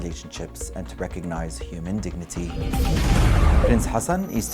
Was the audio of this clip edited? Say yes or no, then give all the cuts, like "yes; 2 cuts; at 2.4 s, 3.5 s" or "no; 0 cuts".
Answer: no; 0 cuts